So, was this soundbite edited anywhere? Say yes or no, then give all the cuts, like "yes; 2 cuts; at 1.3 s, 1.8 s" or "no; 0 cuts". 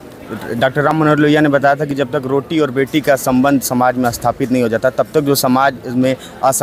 no; 0 cuts